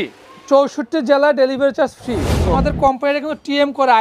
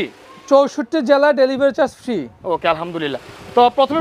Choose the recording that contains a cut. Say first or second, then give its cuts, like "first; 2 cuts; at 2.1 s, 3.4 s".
first; 1 cut; at 2.6 s